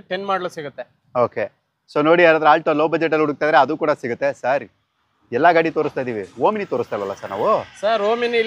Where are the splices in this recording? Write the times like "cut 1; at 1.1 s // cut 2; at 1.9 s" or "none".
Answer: none